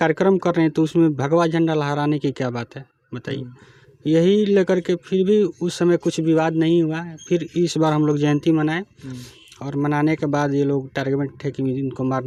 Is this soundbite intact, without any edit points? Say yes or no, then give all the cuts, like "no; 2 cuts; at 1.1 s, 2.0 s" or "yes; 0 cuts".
yes; 0 cuts